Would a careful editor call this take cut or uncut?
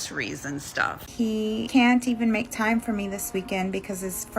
cut